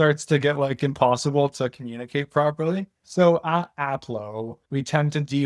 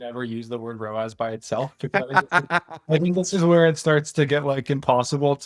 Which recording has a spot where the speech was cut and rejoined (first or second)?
first